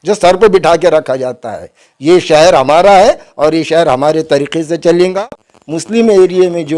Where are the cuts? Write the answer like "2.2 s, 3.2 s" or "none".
5.1 s